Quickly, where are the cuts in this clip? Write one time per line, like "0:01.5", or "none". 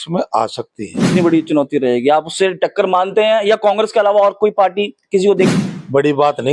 0:01.2